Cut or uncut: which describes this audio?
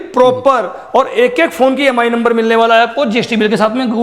uncut